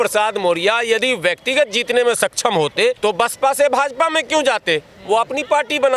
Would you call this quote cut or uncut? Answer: cut